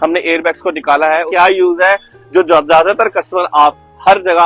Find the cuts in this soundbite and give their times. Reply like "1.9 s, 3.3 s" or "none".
1.3 s